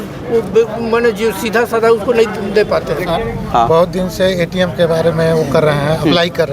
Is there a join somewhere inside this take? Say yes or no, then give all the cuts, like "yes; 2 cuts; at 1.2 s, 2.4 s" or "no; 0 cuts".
yes; 1 cut; at 3.1 s